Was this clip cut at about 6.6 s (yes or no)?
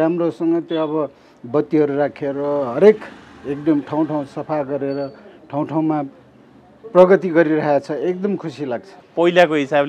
no